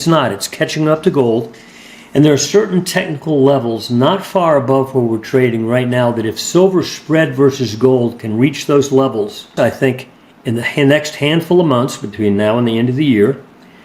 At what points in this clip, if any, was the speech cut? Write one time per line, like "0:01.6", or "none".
0:09.5